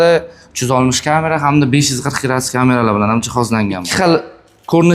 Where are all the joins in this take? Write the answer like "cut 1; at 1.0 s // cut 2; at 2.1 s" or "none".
cut 1; at 3.8 s